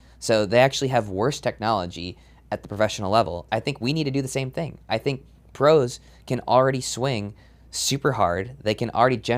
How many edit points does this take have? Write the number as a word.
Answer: one